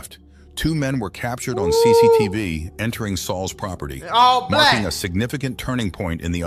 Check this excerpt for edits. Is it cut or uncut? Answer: uncut